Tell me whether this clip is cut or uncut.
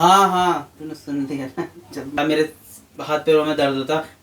cut